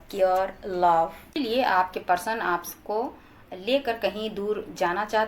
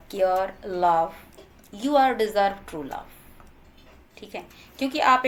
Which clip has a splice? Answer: first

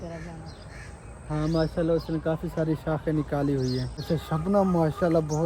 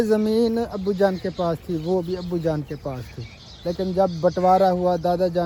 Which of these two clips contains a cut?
first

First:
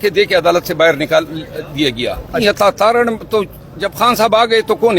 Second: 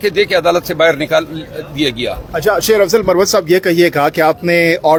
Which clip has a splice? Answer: first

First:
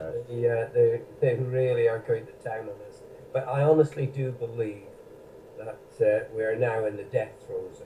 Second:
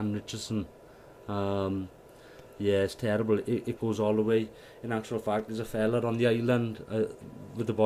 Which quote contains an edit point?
first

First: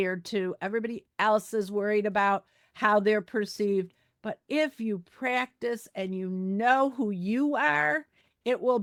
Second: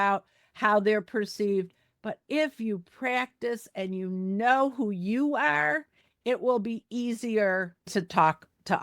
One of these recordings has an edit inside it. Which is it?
second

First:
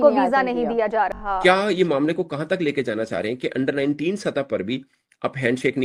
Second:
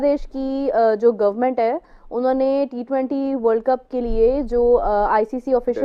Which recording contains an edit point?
first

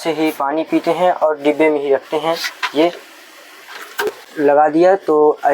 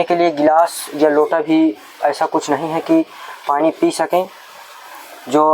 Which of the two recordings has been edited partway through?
first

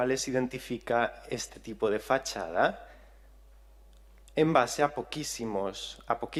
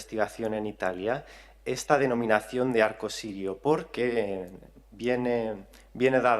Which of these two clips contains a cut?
second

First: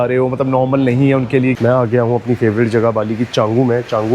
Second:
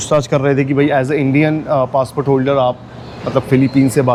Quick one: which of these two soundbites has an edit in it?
first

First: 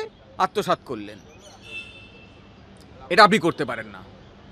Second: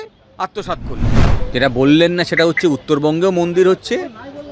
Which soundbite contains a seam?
second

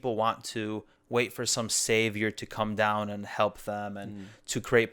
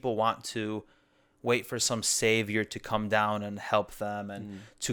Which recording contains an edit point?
first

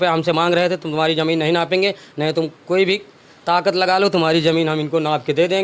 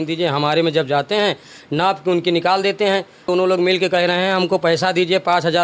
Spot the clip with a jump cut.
second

